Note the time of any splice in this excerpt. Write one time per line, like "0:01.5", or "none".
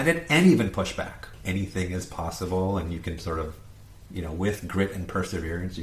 0:01.3

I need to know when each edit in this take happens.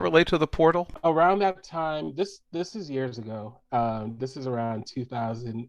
0:00.9

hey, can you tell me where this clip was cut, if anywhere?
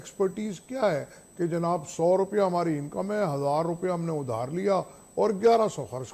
none

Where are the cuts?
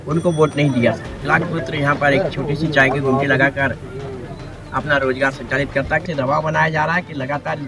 0:01.2
0:06.0

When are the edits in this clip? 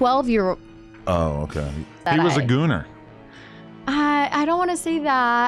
0:02.0

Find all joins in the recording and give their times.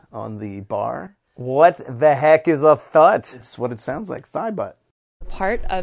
none

